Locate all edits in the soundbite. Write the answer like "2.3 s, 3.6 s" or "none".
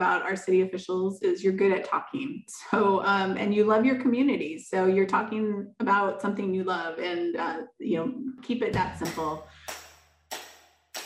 8.4 s, 9.9 s